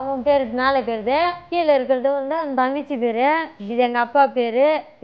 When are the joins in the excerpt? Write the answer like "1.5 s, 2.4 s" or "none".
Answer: 1.4 s, 3.6 s